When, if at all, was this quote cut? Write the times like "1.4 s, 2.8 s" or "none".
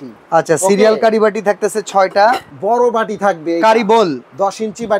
2.5 s